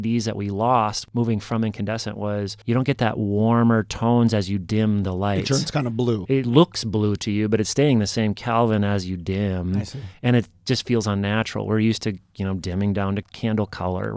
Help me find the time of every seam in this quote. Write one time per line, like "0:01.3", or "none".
0:01.0
0:02.6
0:06.2
0:13.3